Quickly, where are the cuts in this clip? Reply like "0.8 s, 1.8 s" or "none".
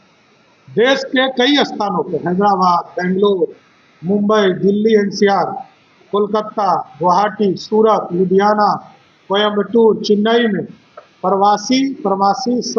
none